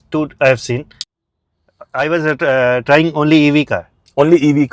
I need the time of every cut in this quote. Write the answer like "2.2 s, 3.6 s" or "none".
1.0 s